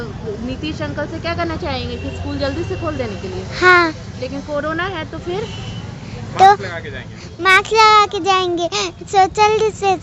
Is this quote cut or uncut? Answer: uncut